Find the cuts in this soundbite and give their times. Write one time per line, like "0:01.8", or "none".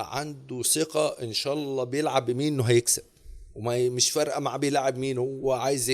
none